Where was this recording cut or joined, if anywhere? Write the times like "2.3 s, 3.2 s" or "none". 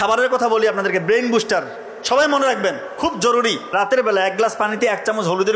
3.6 s